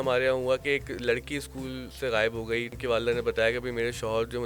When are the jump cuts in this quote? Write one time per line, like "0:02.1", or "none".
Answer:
0:01.9
0:02.7